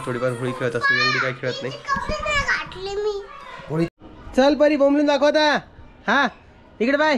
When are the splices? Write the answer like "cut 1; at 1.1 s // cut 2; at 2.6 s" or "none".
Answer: cut 1; at 3.9 s